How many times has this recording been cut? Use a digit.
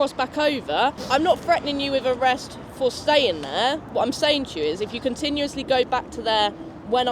1